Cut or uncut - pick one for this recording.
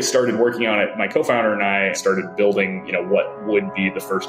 cut